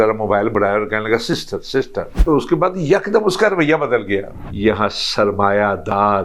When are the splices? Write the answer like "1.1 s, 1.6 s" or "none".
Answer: 2.2 s, 4.3 s